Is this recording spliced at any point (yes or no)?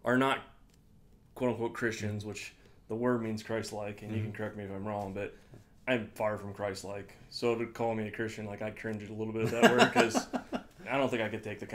no